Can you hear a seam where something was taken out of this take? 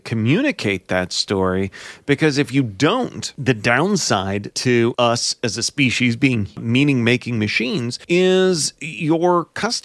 yes; 4 cuts; at 3.3 s, 4.8 s, 6.6 s, 7.9 s

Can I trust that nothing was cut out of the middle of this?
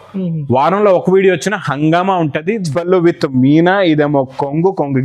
no; 1 cut; at 2.7 s

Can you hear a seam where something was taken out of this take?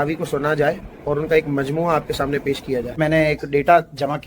yes; 1 cut; at 3.0 s

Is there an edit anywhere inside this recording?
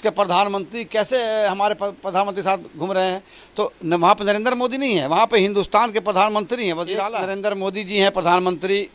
yes; 1 cut; at 7.1 s

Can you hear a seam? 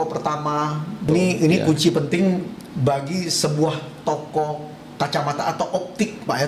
yes; 1 cut; at 1.1 s

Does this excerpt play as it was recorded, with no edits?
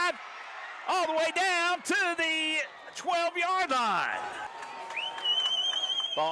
yes; 0 cuts

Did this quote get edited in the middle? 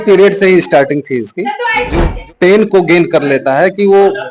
yes; 1 cut; at 2.1 s

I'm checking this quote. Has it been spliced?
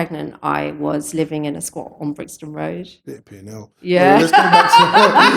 no; 0 cuts

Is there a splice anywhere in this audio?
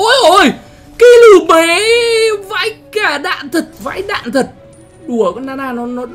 yes; 1 cut; at 3.8 s

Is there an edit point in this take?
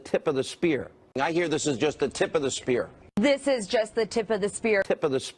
no; 0 cuts

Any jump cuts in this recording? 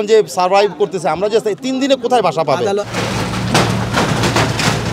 no; 0 cuts

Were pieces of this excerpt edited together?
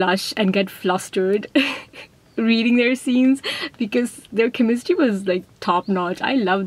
no; 0 cuts

